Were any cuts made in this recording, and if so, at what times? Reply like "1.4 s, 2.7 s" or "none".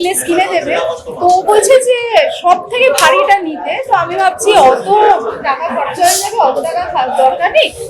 none